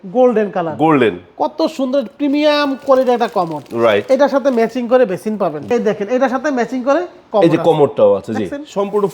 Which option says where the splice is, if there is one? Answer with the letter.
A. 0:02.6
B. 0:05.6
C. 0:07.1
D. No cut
B